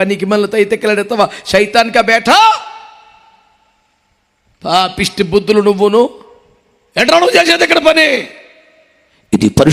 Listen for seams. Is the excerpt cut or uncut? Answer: uncut